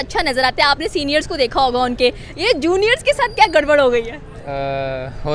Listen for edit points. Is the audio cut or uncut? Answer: uncut